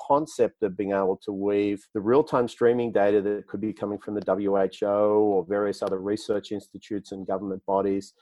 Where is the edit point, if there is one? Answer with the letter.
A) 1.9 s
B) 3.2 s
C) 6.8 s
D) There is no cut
A